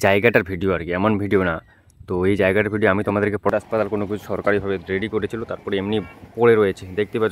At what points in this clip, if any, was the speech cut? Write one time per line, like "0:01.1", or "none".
0:03.5